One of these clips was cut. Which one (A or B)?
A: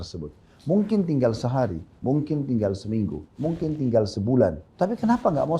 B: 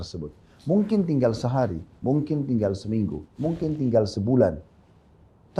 A